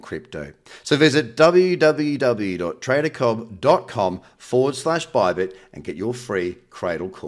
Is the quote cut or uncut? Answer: uncut